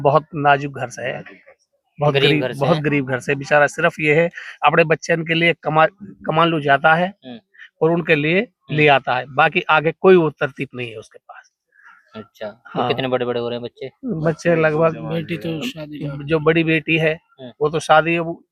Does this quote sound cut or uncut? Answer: uncut